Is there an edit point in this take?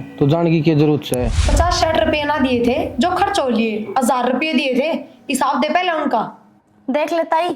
yes; 1 cut; at 1.4 s

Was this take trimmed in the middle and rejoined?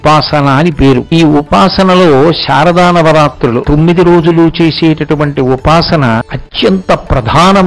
yes; 3 cuts; at 1.1 s, 3.6 s, 6.4 s

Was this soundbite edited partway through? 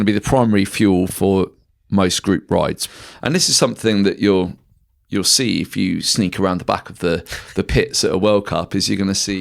yes; 1 cut; at 2.8 s

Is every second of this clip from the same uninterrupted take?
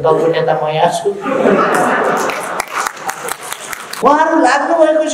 no; 1 cut; at 4.0 s

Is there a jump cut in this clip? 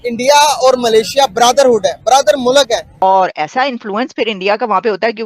yes; 1 cut; at 2.9 s

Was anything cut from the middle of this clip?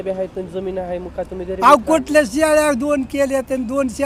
no; 0 cuts

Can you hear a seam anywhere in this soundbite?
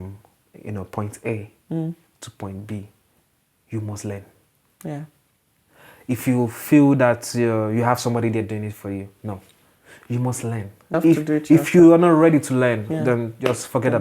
yes; 1 cut; at 11.0 s

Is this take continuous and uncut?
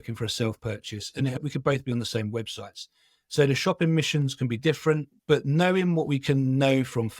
no; 2 cuts; at 1.4 s, 5.1 s

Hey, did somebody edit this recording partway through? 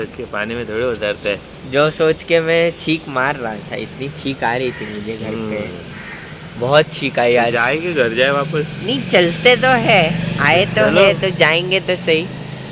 no; 0 cuts

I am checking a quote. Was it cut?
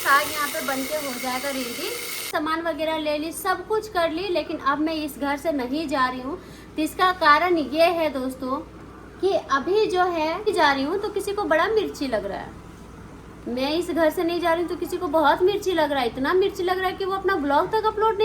yes; 2 cuts; at 2.3 s, 10.5 s

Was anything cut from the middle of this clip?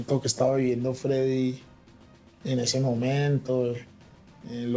no; 0 cuts

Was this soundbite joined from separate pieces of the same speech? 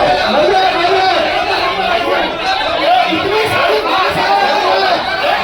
no; 0 cuts

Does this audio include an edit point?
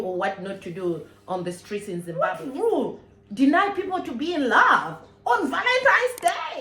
yes; 1 cut; at 2.1 s

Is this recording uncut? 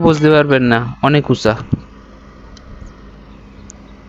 yes; 0 cuts

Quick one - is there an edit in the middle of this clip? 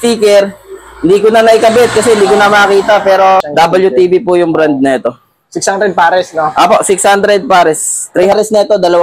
yes; 2 cuts; at 3.5 s, 8.3 s

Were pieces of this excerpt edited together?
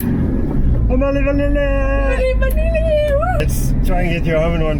yes; 1 cut; at 3.4 s

